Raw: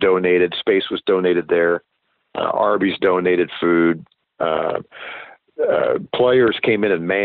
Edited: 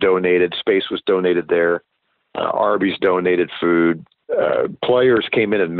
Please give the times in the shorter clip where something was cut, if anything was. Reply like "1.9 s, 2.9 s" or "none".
4.1 s